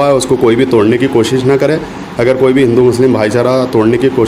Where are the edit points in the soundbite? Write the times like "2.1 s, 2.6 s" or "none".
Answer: none